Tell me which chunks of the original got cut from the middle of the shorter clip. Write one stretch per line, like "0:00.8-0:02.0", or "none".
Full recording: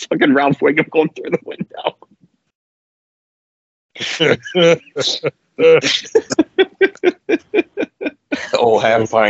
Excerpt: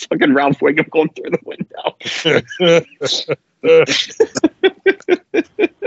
0:02.1-0:04.0